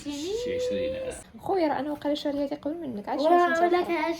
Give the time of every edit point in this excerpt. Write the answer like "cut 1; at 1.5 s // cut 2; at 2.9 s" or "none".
cut 1; at 1.2 s